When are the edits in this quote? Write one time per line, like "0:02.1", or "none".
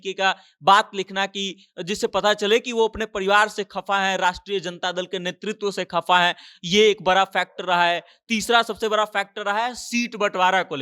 none